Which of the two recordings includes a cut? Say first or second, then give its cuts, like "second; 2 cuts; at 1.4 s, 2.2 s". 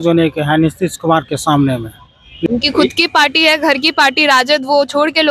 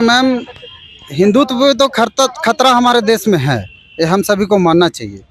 first; 1 cut; at 2.5 s